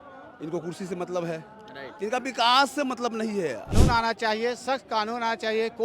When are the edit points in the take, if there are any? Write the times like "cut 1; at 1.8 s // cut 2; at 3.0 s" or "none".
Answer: cut 1; at 3.7 s